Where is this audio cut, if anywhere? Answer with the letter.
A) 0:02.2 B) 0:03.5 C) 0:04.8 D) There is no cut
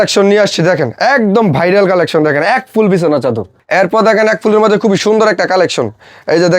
B